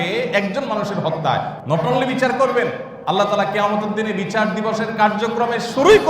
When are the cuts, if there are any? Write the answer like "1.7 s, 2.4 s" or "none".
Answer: 1.6 s, 2.9 s